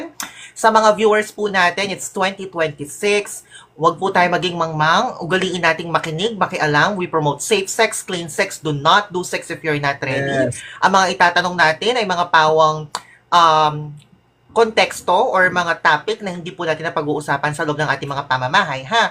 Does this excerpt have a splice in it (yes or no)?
no